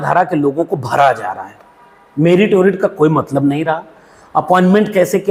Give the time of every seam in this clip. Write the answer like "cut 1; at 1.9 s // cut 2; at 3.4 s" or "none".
none